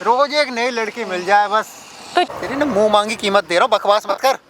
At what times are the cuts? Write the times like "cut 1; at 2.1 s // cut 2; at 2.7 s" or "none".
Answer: cut 1; at 2.3 s